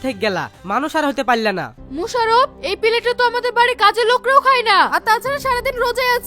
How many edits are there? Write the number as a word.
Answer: one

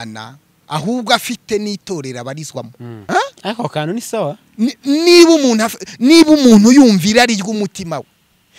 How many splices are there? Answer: one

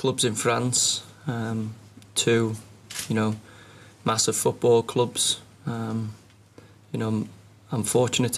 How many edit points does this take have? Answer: zero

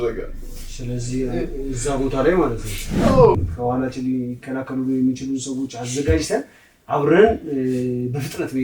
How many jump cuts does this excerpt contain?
one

